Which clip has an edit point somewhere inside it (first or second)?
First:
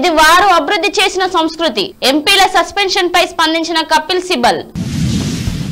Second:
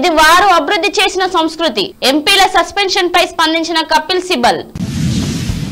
first